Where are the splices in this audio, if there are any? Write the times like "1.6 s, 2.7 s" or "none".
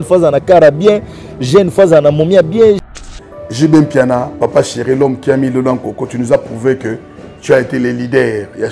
2.8 s